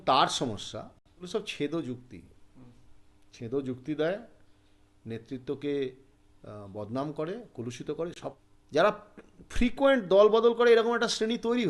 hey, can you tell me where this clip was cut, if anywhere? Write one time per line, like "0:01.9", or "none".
0:01.3
0:08.2